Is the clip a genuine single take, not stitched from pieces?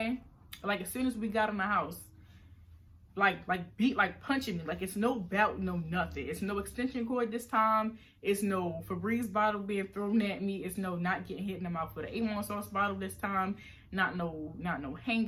yes; 0 cuts

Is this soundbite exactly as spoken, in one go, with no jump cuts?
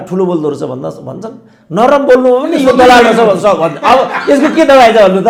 yes; 0 cuts

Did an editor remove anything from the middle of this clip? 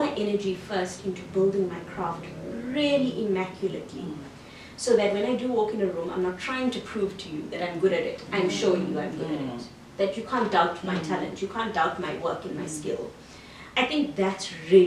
no; 0 cuts

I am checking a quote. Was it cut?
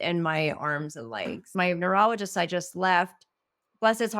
yes; 1 cut; at 1.5 s

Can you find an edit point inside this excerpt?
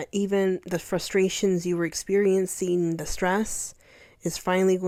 no; 0 cuts

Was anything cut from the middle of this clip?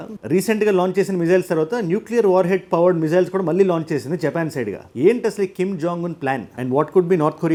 no; 0 cuts

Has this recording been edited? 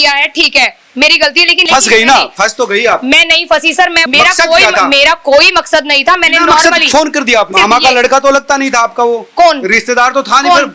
yes; 3 cuts; at 1.6 s, 4.0 s, 7.5 s

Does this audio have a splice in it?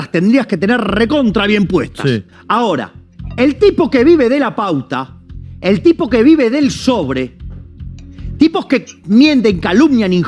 yes; 1 cut; at 2.3 s

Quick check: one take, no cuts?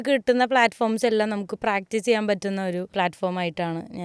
no; 1 cut; at 2.9 s

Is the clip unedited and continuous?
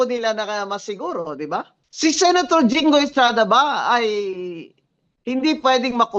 no; 1 cut; at 1.8 s

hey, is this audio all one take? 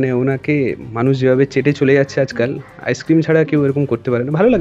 yes; 0 cuts

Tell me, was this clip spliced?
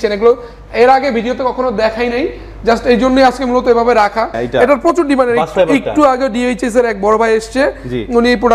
yes; 1 cut; at 4.4 s

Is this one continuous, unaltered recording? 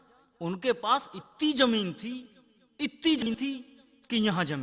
no; 1 cut; at 3.2 s

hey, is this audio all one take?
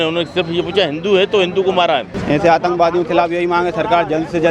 no; 1 cut; at 2.1 s

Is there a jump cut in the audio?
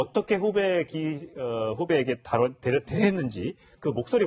yes; 1 cut; at 1.8 s

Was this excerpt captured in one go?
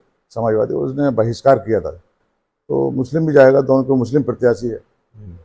no; 1 cut; at 2.3 s

